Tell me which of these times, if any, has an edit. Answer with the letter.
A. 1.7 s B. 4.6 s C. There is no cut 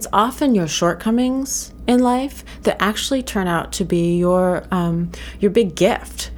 C